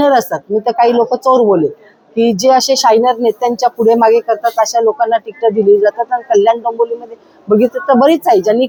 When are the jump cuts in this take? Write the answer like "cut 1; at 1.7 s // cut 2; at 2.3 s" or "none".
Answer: none